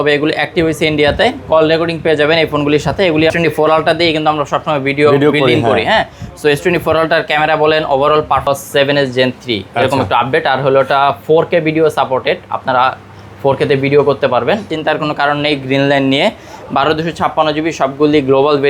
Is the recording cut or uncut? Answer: cut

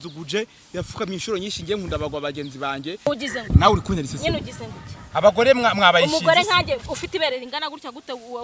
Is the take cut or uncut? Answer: cut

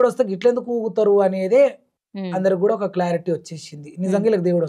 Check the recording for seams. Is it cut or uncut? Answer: uncut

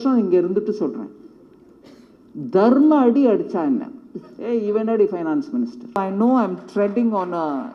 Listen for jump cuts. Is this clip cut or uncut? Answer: cut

